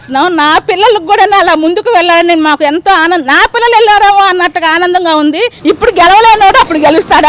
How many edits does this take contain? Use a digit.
1